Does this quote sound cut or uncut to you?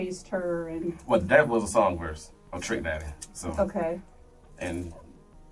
uncut